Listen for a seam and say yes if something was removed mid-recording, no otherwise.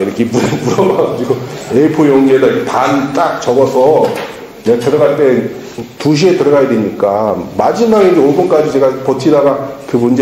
no